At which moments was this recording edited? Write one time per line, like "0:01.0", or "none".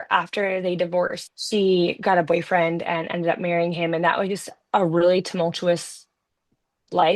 0:01.2